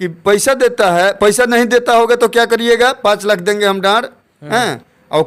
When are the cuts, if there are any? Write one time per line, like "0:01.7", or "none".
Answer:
none

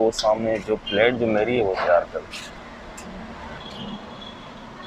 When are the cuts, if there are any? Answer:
0:03.6

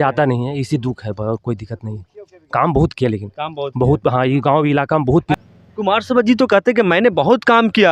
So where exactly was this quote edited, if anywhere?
0:05.4

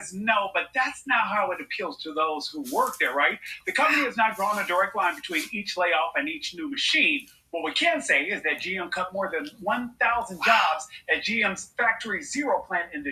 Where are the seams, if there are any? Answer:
none

